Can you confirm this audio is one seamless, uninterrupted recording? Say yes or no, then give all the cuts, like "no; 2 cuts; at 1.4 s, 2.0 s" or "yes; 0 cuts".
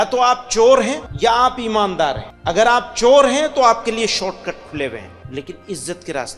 no; 3 cuts; at 1.1 s, 2.3 s, 5.2 s